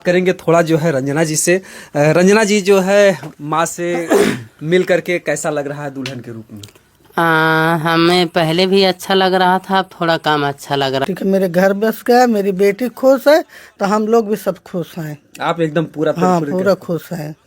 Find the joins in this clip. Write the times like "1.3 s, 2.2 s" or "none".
11.0 s